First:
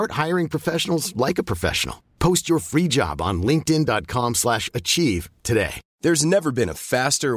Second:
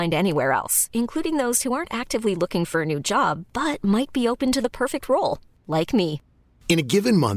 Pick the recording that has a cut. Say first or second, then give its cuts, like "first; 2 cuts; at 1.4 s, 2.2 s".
first; 1 cut; at 5.8 s